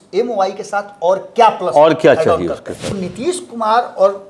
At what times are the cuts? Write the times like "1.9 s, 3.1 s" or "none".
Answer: 3.1 s